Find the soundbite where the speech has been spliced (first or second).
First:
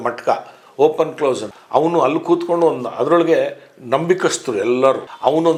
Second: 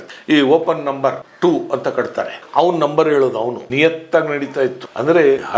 second